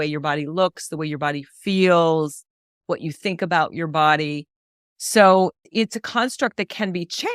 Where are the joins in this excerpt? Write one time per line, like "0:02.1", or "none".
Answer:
none